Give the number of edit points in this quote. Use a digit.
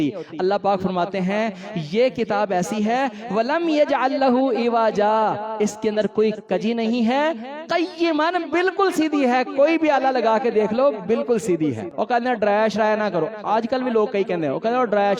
1